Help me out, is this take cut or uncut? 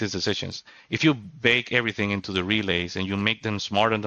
uncut